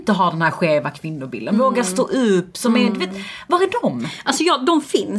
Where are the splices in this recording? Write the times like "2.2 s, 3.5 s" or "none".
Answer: none